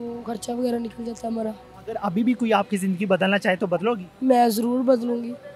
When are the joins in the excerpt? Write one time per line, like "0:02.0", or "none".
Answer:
0:01.7